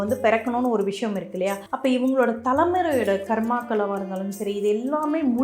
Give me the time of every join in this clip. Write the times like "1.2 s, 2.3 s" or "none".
1.7 s